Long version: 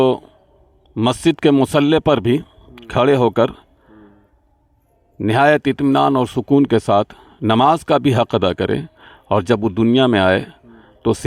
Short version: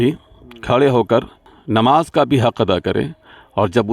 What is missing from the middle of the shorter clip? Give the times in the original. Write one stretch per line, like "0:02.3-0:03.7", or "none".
0:03.8-0:07.2